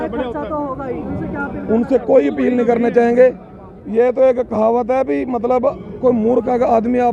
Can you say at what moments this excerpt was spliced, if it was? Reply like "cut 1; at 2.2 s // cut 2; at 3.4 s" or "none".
none